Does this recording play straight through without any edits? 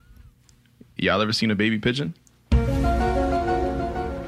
yes; 0 cuts

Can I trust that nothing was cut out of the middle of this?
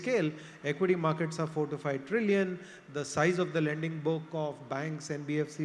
yes; 0 cuts

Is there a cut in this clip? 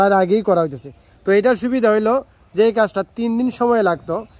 no; 0 cuts

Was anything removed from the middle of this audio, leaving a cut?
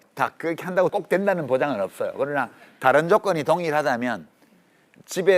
yes; 1 cut; at 0.9 s

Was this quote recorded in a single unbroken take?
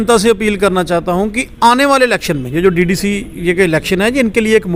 yes; 0 cuts

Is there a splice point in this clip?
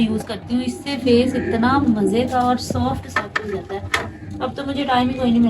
no; 0 cuts

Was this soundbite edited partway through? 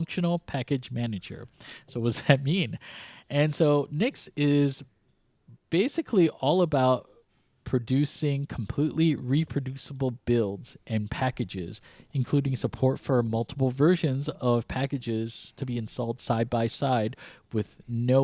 no; 0 cuts

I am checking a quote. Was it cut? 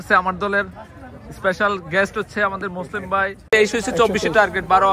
yes; 1 cut; at 3.4 s

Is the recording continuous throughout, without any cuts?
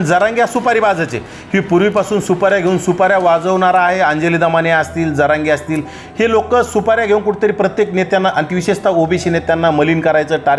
yes; 0 cuts

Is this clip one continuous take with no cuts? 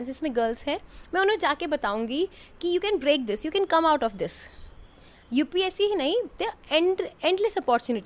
yes; 0 cuts

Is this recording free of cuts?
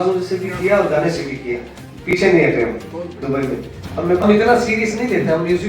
no; 1 cut; at 4.2 s

